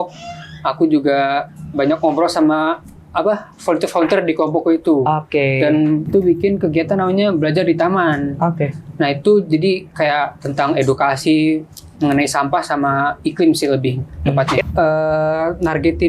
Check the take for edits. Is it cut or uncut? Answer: cut